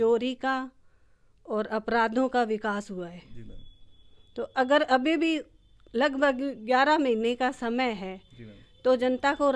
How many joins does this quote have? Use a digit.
0